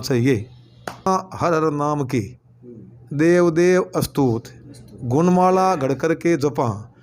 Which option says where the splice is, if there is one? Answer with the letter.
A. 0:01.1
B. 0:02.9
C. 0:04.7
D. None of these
A